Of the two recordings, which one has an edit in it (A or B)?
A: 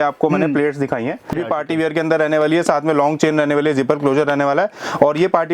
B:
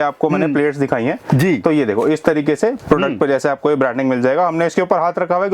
A